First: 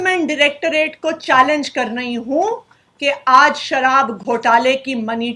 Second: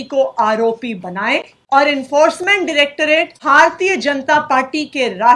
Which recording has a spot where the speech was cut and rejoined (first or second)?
second